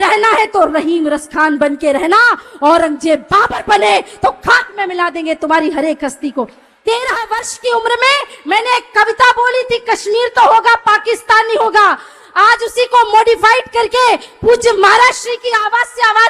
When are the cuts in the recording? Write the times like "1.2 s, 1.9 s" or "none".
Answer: 6.6 s